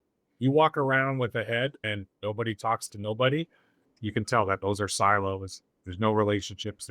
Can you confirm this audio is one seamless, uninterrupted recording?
no; 2 cuts; at 1.8 s, 3.9 s

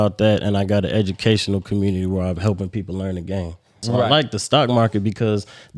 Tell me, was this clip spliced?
yes; 1 cut; at 3.8 s

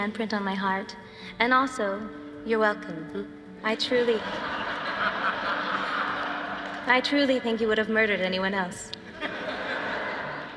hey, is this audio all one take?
yes; 0 cuts

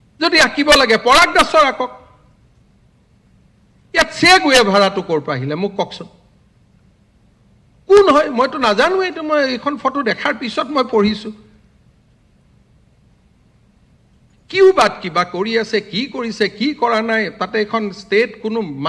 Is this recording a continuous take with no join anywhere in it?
yes; 0 cuts

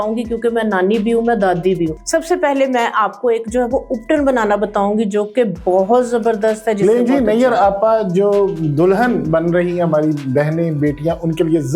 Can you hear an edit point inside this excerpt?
yes; 1 cut; at 2.0 s

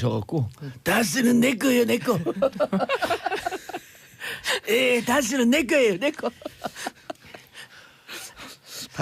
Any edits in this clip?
yes; 1 cut; at 5.0 s

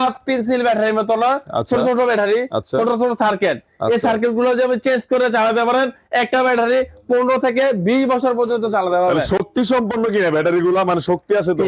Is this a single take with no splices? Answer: yes; 0 cuts

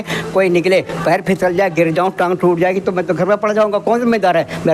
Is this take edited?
no; 0 cuts

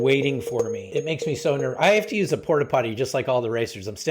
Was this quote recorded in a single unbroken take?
no; 1 cut; at 0.9 s

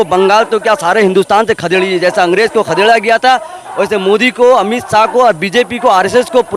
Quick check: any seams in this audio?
no; 0 cuts

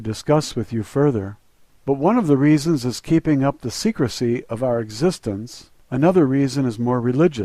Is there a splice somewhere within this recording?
yes; 1 cut; at 4.7 s

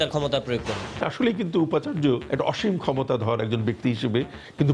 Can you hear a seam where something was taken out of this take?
yes; 2 cuts; at 1.0 s, 2.3 s

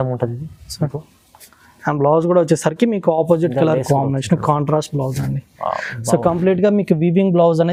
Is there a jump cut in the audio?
no; 0 cuts

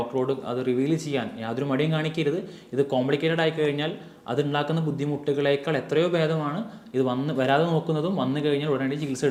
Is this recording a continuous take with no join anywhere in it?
yes; 0 cuts

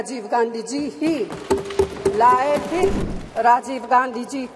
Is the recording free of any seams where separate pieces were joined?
no; 1 cut; at 3.0 s

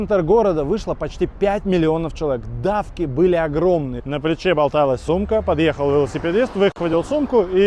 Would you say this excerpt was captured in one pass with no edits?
no; 1 cut; at 4.0 s

